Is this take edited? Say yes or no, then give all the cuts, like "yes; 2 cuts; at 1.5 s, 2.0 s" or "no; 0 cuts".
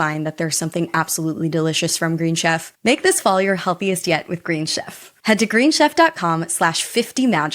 yes; 1 cut; at 2.7 s